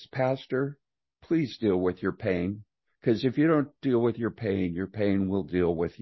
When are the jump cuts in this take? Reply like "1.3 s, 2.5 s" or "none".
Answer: none